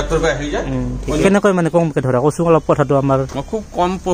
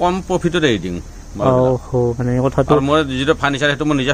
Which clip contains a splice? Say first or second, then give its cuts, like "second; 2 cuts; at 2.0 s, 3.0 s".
first; 1 cut; at 1.2 s